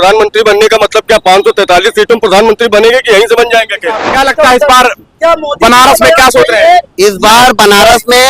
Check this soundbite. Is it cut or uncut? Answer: cut